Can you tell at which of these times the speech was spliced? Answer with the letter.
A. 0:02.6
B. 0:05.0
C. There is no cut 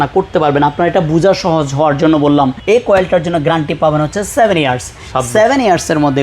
A